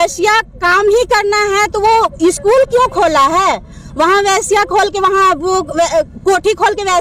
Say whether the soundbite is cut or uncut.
uncut